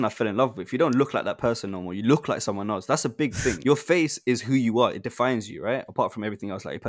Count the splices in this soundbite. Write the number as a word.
one